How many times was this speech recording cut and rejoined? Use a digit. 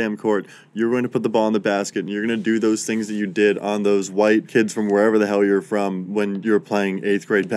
2